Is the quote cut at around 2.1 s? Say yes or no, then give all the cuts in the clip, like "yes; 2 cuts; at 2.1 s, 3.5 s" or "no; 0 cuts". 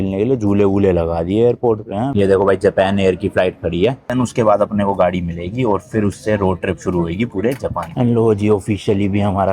yes; 3 cuts; at 2.1 s, 4.1 s, 7.9 s